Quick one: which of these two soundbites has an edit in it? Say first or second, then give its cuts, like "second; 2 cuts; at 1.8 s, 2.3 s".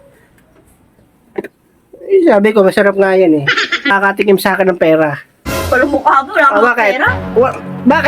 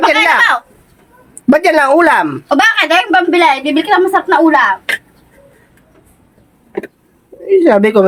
first; 1 cut; at 3.9 s